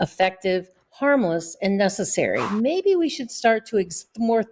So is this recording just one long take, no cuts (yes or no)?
no